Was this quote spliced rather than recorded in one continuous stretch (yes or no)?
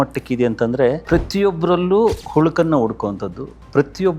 yes